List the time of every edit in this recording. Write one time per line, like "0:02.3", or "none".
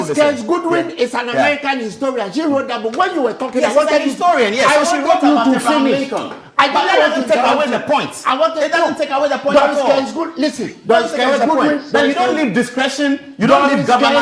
none